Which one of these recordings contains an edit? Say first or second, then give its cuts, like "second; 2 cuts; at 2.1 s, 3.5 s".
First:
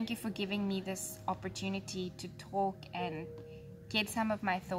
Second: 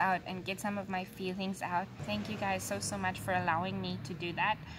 second; 1 cut; at 2.0 s